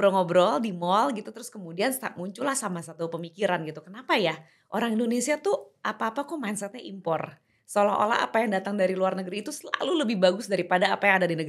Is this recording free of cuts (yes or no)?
yes